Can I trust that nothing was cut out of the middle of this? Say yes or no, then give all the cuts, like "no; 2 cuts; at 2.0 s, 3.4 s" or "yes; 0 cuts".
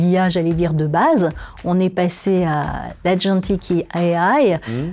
yes; 0 cuts